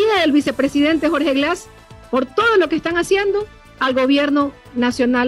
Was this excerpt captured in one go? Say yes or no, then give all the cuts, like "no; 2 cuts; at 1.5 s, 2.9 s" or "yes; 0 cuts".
yes; 0 cuts